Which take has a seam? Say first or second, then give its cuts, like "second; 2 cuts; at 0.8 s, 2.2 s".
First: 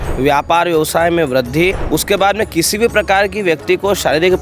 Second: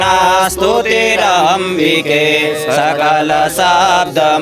first; 1 cut; at 1.8 s